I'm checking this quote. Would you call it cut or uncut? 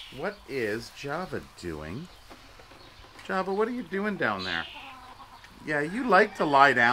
uncut